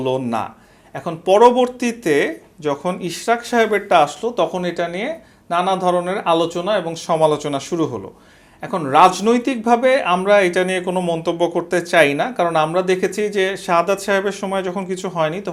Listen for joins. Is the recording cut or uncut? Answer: uncut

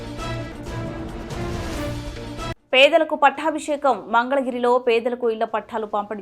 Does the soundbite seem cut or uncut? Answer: uncut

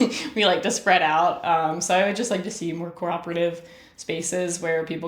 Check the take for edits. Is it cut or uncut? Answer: uncut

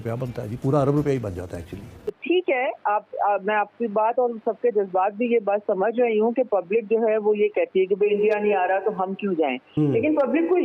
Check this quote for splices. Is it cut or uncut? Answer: cut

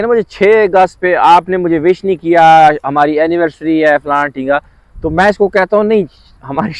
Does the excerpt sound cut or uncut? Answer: uncut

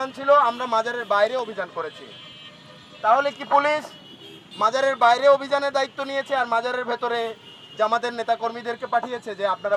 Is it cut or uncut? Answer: uncut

